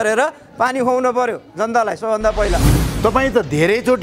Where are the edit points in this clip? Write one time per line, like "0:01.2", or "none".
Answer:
0:02.7